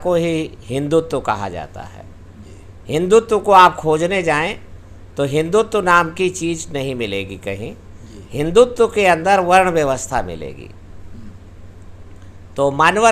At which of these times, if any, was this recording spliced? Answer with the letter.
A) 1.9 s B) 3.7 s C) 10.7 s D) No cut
D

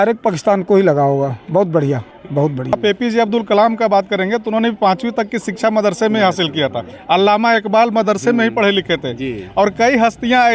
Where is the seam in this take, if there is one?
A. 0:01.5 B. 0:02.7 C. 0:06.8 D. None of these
B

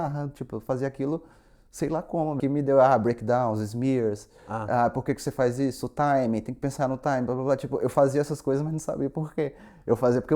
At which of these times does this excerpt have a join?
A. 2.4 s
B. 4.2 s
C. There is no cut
A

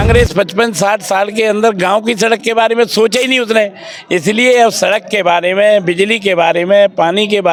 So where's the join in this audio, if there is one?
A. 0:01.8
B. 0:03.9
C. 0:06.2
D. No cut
D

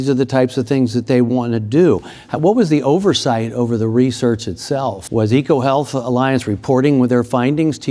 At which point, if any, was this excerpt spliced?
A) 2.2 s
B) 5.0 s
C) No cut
B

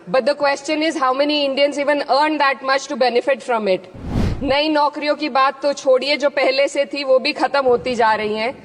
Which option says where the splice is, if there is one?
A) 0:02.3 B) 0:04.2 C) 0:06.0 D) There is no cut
B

